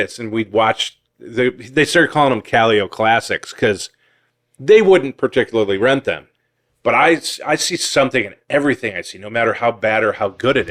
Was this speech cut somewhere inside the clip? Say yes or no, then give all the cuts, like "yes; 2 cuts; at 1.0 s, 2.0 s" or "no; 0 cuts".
no; 0 cuts